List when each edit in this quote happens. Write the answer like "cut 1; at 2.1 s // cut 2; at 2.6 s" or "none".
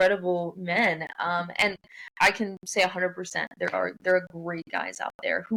none